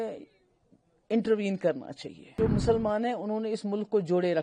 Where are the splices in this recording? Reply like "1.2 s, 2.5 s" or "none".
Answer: 2.4 s